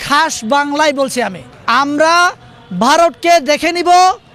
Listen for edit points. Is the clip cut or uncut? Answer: cut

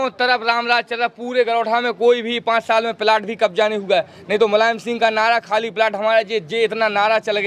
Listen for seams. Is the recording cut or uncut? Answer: uncut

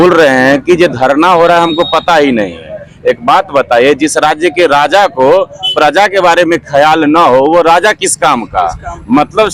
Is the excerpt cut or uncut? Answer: uncut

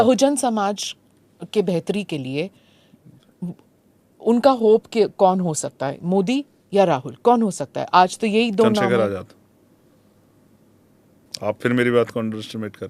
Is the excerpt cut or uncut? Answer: uncut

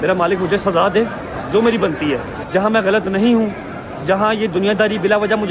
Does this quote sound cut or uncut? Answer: cut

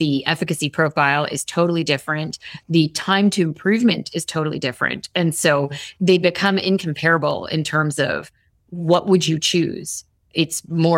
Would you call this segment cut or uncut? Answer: uncut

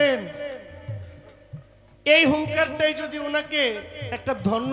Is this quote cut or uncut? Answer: uncut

